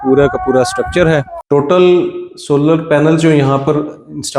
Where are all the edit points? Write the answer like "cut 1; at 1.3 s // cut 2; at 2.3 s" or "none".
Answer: cut 1; at 1.3 s